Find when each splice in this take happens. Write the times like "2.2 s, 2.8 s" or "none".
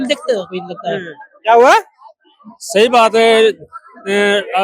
none